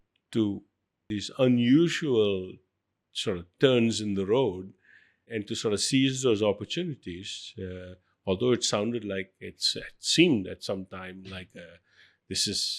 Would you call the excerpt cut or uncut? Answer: cut